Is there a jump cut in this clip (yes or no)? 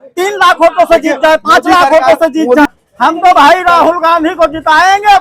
yes